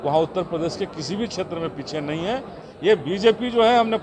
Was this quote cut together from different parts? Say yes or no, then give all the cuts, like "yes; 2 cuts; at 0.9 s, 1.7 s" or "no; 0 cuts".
yes; 1 cut; at 2.6 s